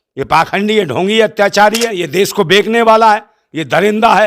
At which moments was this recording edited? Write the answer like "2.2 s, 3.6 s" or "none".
2.0 s